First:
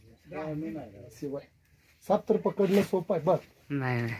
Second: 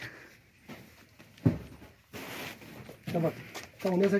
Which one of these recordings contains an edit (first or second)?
first